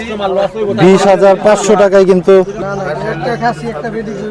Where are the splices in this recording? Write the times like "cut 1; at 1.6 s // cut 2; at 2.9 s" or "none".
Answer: cut 1; at 2.6 s